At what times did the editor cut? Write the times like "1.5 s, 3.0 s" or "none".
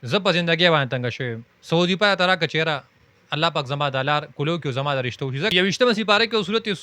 5.5 s